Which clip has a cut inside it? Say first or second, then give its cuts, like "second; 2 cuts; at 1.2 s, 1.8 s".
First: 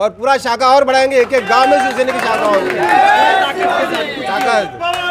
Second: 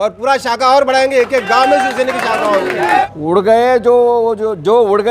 second; 1 cut; at 3.0 s